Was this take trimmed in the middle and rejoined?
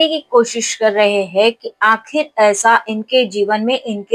no; 0 cuts

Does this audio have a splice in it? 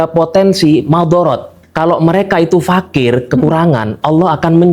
yes; 1 cut; at 1.7 s

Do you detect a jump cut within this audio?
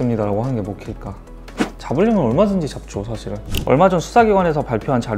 yes; 2 cuts; at 1.5 s, 3.5 s

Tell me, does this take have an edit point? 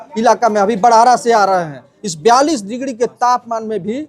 no; 0 cuts

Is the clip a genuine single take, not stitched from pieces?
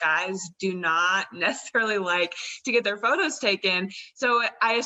yes; 0 cuts

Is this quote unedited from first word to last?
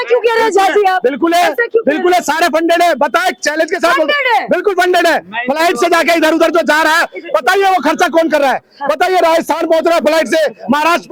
yes; 0 cuts

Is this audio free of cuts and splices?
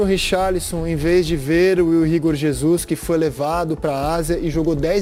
yes; 0 cuts

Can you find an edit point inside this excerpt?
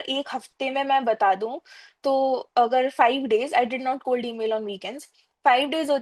no; 0 cuts

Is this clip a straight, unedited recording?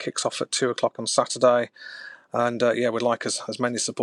yes; 0 cuts

